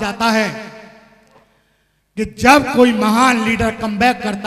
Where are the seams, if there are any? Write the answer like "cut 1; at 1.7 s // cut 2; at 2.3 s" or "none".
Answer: none